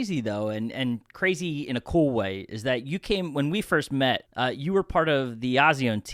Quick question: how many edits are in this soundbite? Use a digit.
1